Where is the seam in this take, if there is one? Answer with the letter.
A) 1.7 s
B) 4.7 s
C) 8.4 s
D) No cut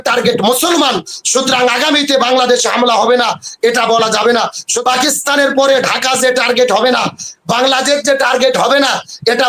B